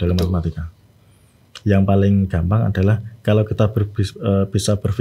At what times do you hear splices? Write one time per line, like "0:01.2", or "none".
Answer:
none